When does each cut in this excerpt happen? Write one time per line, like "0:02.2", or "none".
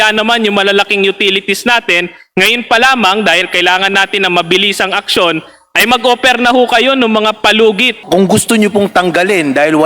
0:08.0